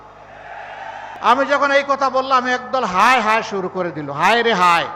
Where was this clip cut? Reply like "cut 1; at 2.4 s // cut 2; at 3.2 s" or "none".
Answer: cut 1; at 1.0 s